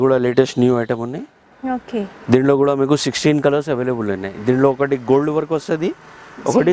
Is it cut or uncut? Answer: uncut